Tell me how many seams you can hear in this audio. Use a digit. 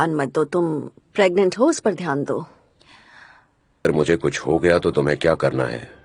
1